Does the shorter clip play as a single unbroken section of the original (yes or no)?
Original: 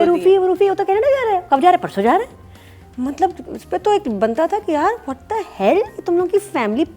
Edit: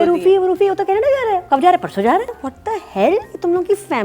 no